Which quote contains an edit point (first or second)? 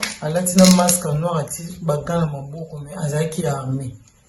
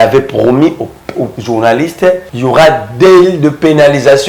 second